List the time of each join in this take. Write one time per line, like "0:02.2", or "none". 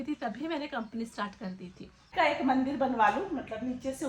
0:02.1